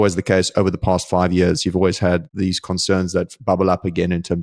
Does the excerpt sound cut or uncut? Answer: cut